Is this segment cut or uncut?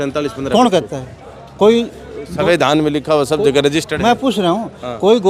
uncut